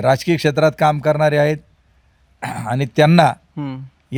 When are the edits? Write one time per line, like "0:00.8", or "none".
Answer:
none